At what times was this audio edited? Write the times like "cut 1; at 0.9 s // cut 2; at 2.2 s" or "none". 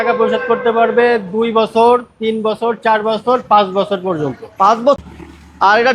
cut 1; at 5.0 s